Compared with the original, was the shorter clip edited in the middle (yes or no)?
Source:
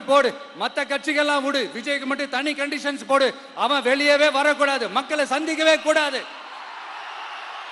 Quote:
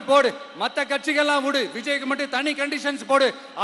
no